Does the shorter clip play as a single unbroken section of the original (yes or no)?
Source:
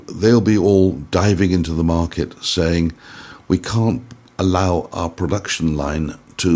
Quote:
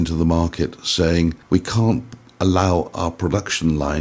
no